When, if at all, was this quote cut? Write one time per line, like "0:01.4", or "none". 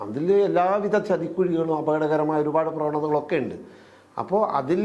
none